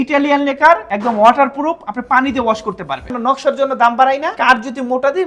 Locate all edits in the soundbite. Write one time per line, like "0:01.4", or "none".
0:00.9
0:03.1
0:04.3

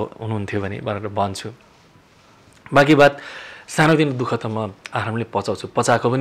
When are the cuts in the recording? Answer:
none

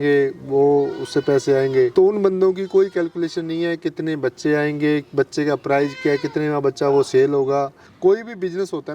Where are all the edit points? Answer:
0:01.9
0:07.8

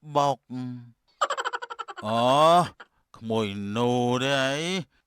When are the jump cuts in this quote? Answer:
none

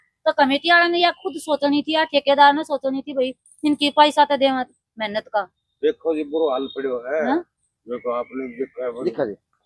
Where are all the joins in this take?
none

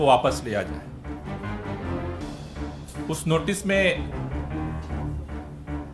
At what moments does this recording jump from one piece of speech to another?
0:01.3
0:03.1
0:04.0

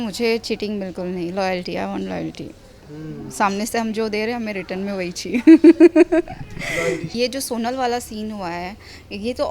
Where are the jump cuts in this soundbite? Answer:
0:07.1

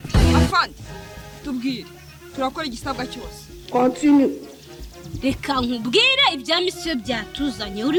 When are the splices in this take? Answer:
none

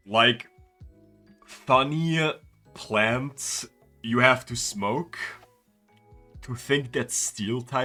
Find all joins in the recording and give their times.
none

